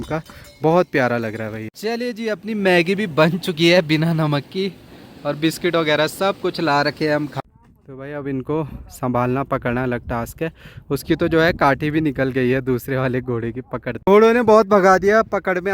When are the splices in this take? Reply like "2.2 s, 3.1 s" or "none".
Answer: 1.6 s, 7.3 s, 13.9 s